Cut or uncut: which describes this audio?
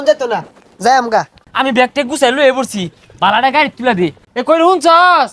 cut